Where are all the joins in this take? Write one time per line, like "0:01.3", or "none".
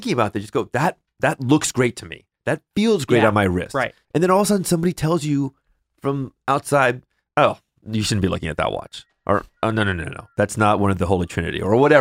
0:03.9